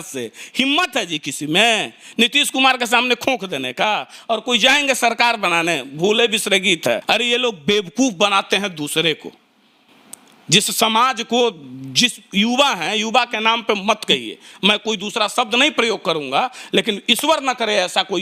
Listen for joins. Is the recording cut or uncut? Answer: cut